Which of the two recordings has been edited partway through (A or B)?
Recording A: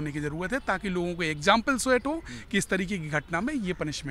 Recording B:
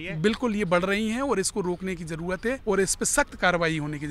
B